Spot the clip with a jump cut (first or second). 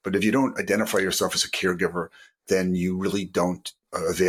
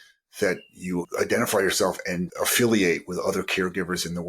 second